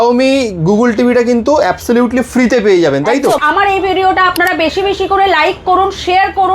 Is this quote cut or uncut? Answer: cut